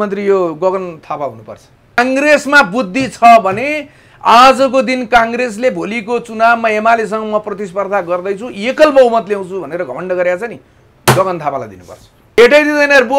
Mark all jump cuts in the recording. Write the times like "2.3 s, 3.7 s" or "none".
2.0 s, 12.4 s

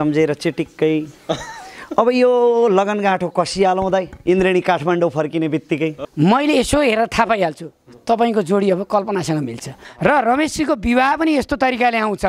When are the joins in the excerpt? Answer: 6.0 s, 9.8 s

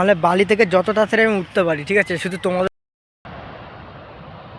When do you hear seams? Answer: 2.7 s

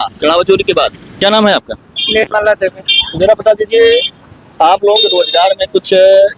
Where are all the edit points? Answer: 1.0 s

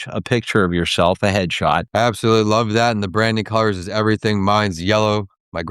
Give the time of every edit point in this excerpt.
1.9 s

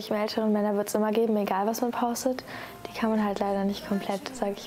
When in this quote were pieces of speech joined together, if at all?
3.6 s

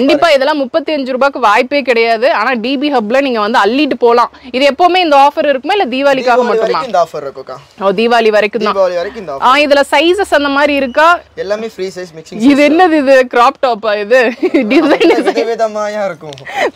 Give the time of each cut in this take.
none

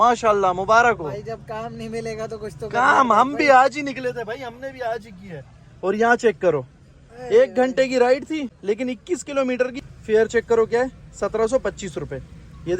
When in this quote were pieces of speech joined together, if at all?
8.5 s, 9.8 s

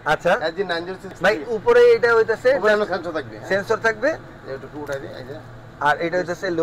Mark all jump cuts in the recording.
1.1 s

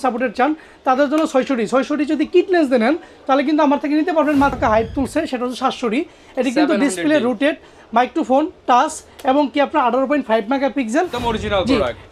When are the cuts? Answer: 4.6 s, 11.1 s

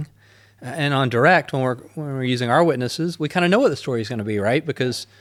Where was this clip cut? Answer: none

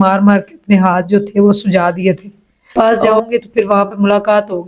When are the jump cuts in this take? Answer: 2.7 s

